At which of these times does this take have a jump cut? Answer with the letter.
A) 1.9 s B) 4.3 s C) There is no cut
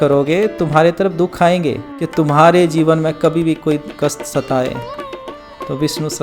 A